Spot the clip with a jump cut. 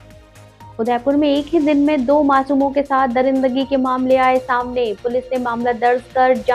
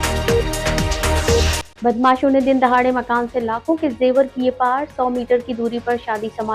second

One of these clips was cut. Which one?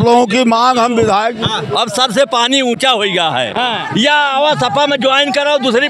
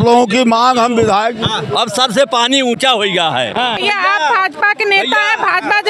second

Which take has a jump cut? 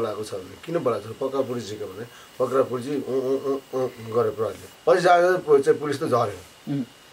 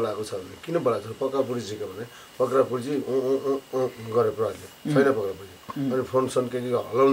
first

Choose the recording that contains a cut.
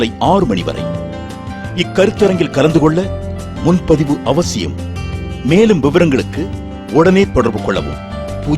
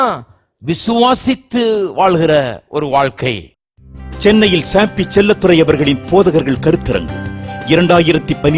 second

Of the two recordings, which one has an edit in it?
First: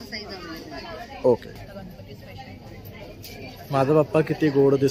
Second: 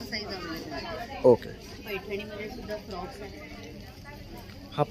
first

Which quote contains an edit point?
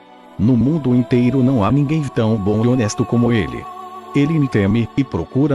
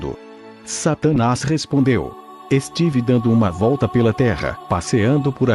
first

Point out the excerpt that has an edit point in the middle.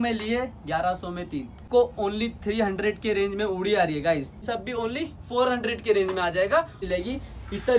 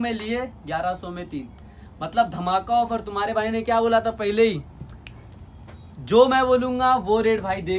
first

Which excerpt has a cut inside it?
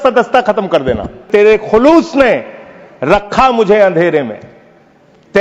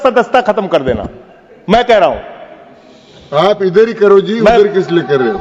first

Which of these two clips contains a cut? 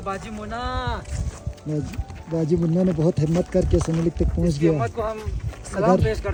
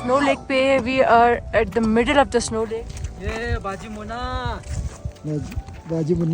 second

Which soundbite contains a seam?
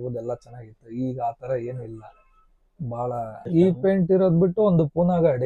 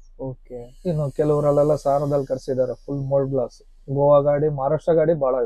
first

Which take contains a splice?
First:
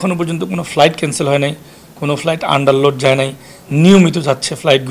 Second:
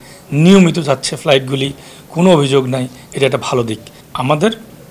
second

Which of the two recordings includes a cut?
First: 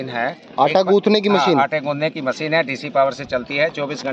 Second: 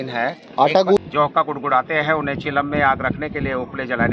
second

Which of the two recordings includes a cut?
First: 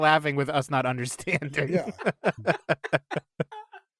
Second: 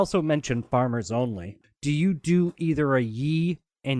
second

